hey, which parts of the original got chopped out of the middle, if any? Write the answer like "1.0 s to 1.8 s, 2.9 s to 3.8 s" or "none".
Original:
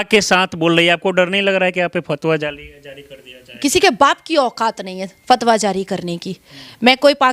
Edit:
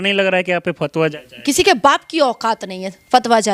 2.6 s to 3.4 s